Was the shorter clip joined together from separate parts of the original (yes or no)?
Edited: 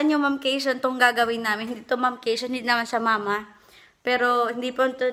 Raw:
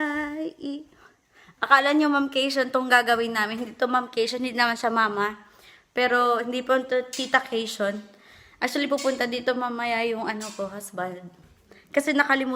no